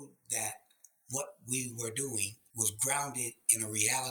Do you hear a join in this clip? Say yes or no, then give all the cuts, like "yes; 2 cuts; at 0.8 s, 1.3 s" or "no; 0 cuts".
yes; 1 cut; at 2.4 s